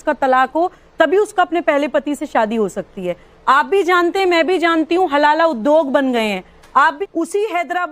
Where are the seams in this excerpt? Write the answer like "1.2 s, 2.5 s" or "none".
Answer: 7.0 s